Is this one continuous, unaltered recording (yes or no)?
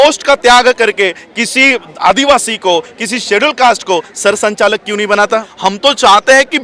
no